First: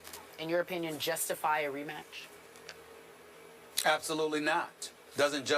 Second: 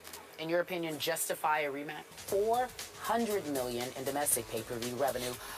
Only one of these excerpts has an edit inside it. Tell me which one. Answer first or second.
first